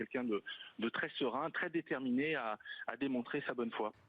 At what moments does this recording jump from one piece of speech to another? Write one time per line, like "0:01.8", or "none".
none